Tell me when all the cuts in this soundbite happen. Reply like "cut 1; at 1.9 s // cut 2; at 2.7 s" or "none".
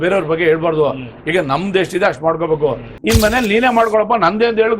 cut 1; at 2.9 s